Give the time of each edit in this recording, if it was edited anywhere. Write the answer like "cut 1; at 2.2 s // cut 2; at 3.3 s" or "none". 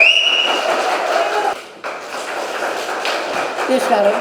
cut 1; at 1.5 s